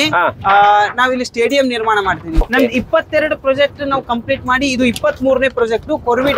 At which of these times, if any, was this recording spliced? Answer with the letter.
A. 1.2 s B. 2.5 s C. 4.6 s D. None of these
B